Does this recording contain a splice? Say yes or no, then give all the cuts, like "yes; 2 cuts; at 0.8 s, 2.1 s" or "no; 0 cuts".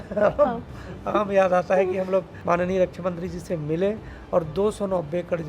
yes; 1 cut; at 2.3 s